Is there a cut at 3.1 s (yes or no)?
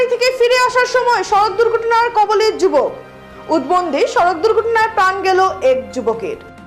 no